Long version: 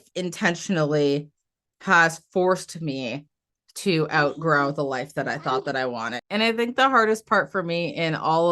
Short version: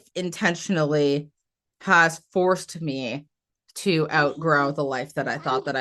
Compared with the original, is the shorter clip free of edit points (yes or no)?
yes